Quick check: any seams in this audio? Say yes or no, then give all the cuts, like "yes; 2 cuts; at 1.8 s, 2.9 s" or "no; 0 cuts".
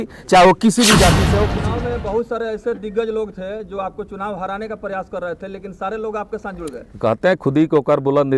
yes; 1 cut; at 1.3 s